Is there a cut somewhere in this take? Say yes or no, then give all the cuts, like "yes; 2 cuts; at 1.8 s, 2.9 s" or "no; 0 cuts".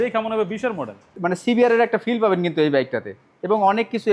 yes; 1 cut; at 1.0 s